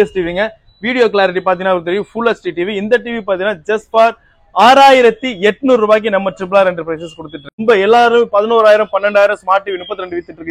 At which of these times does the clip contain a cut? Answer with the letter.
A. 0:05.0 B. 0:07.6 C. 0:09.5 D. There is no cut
B